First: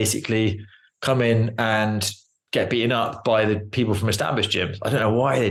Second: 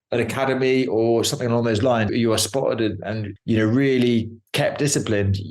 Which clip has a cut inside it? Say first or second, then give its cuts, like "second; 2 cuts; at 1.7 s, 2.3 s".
second; 1 cut; at 2.1 s